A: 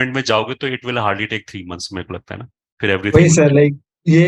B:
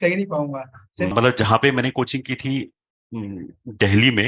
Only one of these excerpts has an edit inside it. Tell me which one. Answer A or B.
B